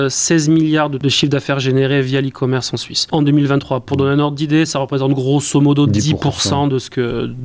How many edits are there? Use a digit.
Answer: 2